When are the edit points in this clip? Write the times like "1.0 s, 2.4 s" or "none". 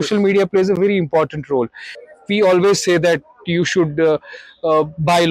2.0 s